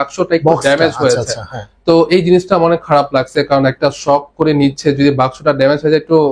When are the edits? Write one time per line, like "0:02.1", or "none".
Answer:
none